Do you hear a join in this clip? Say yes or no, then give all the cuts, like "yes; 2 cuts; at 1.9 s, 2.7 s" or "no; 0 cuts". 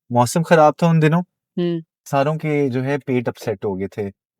yes; 1 cut; at 1.9 s